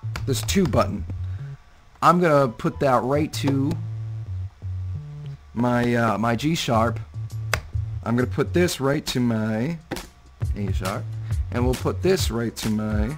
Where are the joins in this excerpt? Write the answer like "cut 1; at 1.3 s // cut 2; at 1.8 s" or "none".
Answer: cut 1; at 12.1 s